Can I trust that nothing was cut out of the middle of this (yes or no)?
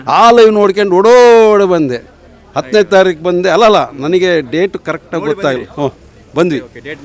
yes